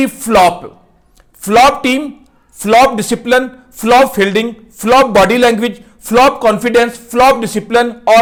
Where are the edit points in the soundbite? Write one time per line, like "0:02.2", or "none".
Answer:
none